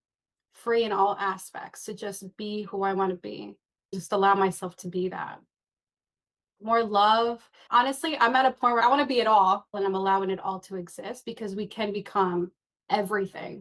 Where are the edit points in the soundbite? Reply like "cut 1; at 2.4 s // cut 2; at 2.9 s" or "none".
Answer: none